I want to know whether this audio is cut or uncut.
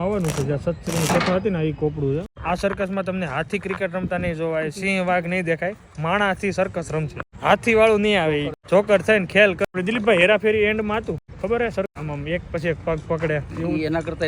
cut